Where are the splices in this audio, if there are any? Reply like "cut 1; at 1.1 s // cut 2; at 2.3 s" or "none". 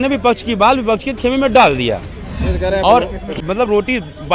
cut 1; at 3.3 s